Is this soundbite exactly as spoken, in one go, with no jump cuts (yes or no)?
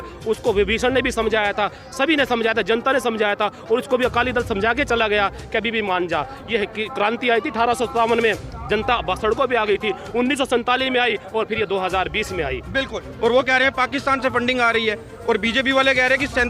no